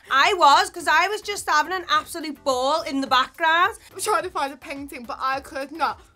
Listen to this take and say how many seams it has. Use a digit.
1